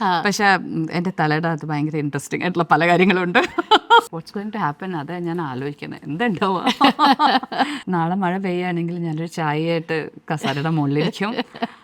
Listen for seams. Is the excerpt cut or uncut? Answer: cut